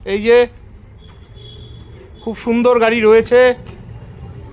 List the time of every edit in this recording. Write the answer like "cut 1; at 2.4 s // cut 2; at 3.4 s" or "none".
none